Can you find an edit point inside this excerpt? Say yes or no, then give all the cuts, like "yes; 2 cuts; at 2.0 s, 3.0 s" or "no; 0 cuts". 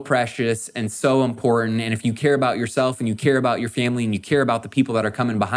no; 0 cuts